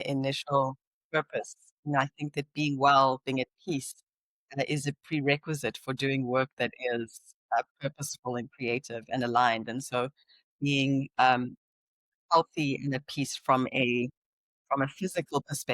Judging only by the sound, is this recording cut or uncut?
uncut